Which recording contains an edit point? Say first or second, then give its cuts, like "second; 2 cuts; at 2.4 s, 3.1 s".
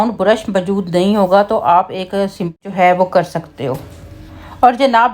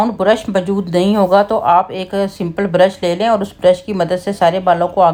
first; 1 cut; at 2.6 s